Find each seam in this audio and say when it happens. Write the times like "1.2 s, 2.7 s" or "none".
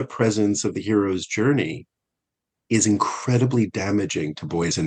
none

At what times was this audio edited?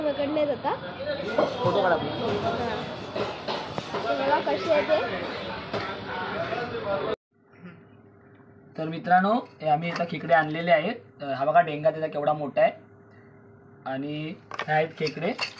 7.3 s

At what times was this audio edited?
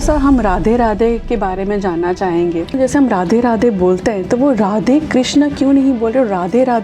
2.8 s

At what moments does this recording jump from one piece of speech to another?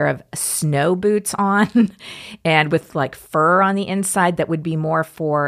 none

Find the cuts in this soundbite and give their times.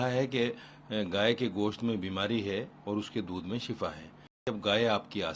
4.5 s

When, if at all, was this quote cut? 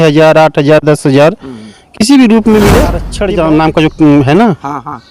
3.1 s

